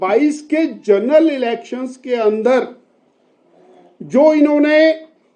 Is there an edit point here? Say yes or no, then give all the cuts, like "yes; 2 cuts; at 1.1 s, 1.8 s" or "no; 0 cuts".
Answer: no; 0 cuts